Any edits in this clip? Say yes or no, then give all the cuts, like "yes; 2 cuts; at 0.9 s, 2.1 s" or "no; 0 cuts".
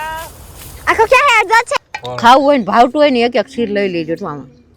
yes; 1 cut; at 1.7 s